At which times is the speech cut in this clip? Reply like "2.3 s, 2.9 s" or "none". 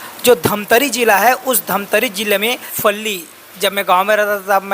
2.7 s